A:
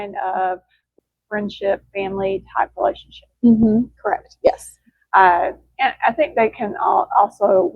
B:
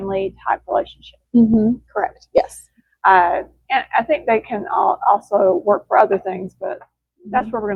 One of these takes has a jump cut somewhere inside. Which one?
A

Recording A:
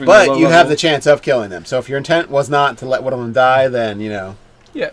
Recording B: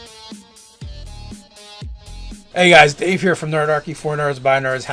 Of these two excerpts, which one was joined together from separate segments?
B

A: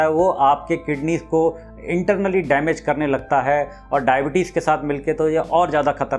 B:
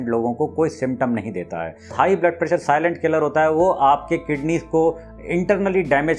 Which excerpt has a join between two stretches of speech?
B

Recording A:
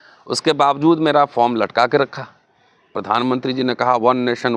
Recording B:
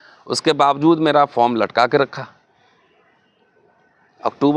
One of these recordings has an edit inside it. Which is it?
A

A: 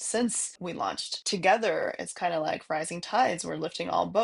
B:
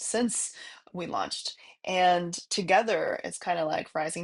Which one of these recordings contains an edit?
A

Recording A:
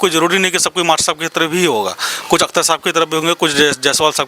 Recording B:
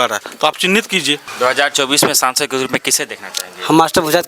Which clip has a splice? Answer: B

